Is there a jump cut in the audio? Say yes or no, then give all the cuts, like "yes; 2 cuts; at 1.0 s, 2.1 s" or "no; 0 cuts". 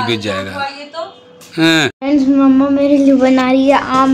yes; 1 cut; at 1.6 s